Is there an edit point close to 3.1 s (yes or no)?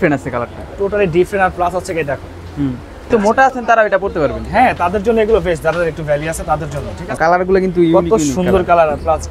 yes